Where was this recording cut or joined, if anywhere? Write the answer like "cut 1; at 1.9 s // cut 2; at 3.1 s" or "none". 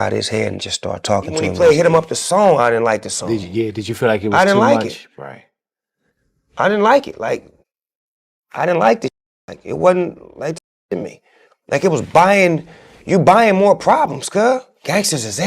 cut 1; at 1.4 s